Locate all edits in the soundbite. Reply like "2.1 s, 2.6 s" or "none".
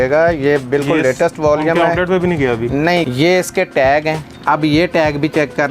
3.0 s, 4.3 s